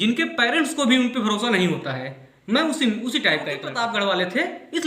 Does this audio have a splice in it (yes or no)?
yes